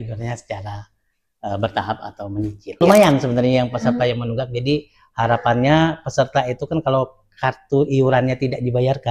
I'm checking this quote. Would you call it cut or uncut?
cut